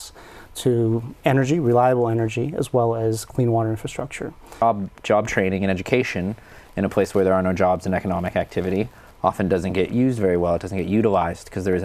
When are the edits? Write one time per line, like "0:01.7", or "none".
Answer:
0:04.6